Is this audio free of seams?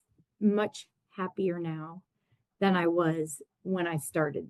yes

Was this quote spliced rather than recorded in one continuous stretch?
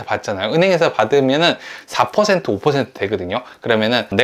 no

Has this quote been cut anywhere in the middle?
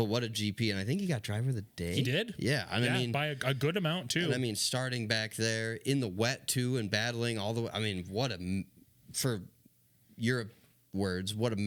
no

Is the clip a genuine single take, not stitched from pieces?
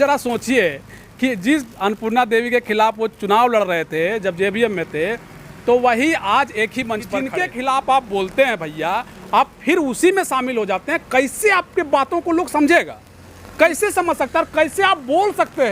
no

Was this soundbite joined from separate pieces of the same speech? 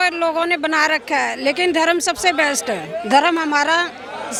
no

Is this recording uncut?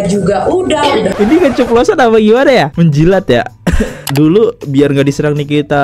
no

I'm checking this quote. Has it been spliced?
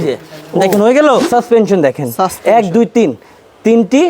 yes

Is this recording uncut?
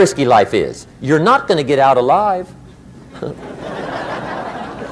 yes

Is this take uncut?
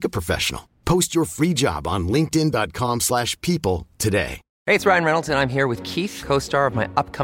no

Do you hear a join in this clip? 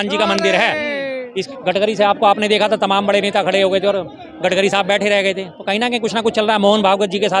yes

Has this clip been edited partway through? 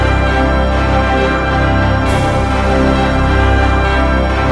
no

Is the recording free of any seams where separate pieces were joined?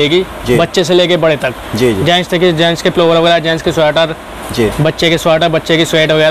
yes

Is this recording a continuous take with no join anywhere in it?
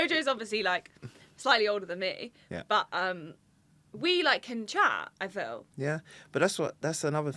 no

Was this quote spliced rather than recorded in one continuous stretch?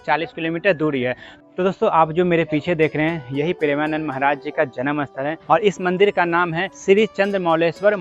yes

